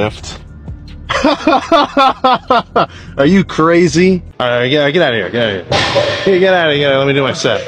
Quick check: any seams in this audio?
yes; 1 cut; at 4.8 s

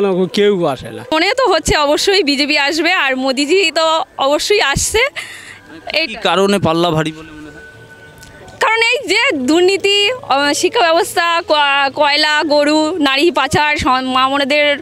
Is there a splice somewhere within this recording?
yes; 1 cut; at 1.1 s

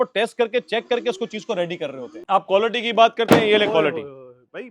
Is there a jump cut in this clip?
yes; 1 cut; at 2.1 s

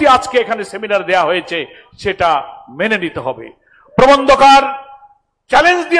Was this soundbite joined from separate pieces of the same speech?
no; 0 cuts

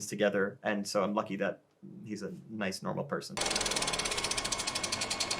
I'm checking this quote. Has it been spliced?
yes; 1 cut; at 3.4 s

